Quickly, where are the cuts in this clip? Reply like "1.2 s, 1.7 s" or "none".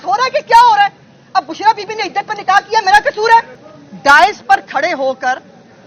3.6 s